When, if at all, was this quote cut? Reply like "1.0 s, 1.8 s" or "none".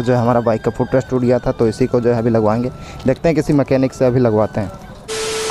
none